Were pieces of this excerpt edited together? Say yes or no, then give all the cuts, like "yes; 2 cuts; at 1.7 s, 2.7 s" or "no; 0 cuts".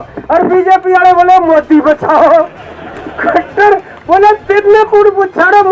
no; 0 cuts